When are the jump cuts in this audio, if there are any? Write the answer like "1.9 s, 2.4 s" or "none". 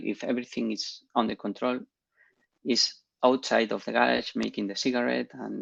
none